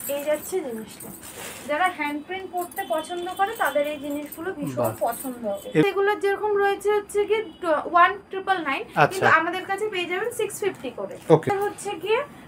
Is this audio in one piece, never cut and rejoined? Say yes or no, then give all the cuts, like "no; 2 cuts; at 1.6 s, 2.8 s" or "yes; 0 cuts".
no; 2 cuts; at 5.8 s, 11.5 s